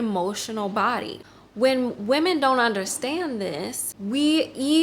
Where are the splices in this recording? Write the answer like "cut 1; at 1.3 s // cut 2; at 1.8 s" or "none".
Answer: cut 1; at 1.1 s // cut 2; at 3.9 s